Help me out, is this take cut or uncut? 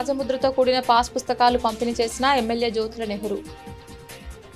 cut